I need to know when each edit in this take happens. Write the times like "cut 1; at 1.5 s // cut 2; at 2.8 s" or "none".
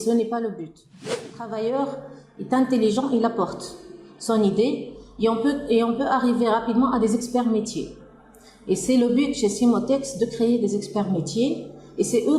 cut 1; at 1.2 s